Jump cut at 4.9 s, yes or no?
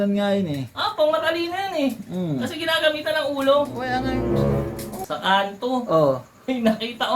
yes